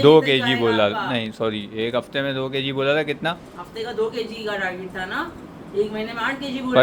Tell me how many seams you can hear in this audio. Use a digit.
0